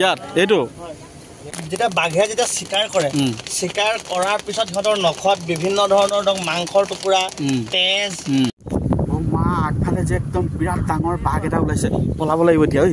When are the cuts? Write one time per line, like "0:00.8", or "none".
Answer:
0:01.5
0:08.6